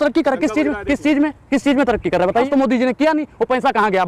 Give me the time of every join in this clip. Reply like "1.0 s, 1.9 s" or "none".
2.5 s